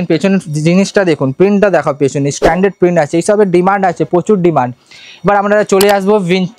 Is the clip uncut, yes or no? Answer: yes